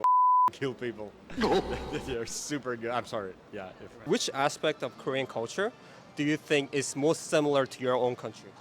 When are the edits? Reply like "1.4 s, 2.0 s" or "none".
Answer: 3.9 s